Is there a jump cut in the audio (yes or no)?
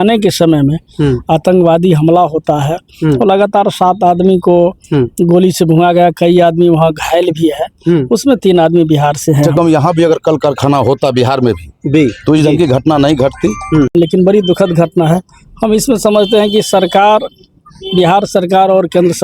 yes